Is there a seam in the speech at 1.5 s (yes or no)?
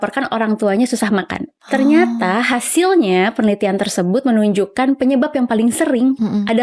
no